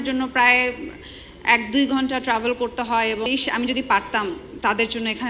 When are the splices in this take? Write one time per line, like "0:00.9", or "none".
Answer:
0:03.3